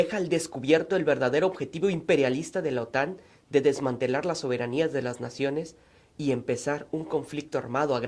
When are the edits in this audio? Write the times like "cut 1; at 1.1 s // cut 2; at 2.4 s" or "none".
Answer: cut 1; at 2.4 s